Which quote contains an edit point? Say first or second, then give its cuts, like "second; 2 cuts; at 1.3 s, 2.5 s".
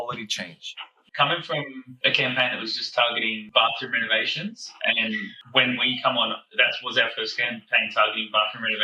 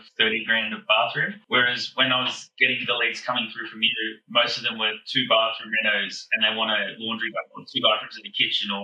first; 3 cuts; at 1.0 s, 1.9 s, 3.4 s